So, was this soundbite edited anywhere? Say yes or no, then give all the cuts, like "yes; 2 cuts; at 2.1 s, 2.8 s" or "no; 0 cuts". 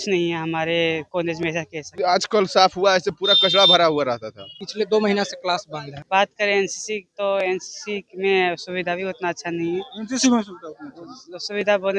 yes; 3 cuts; at 1.9 s, 4.6 s, 6.0 s